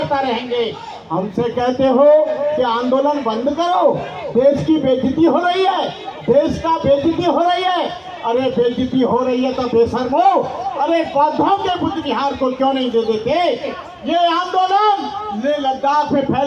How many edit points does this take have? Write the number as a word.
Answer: one